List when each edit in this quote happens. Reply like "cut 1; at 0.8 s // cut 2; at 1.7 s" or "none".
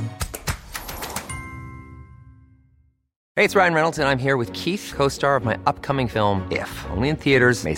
cut 1; at 3.2 s